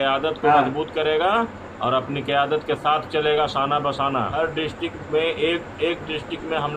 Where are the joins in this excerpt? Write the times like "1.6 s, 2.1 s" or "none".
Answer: 4.3 s